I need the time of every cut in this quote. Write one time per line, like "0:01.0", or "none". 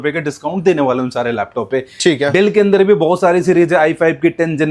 none